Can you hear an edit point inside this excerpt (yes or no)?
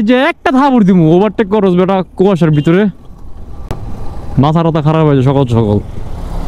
no